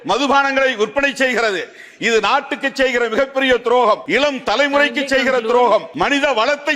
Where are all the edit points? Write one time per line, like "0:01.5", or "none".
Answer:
0:04.0
0:05.9